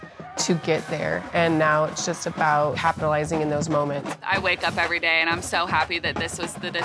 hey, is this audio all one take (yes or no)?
no